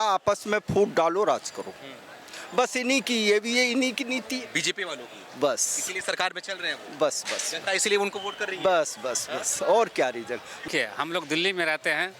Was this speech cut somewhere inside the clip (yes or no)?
no